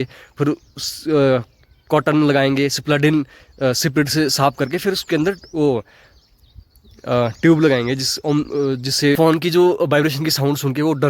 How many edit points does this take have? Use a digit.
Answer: 1